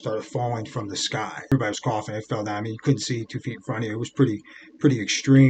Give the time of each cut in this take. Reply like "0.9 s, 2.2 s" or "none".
1.5 s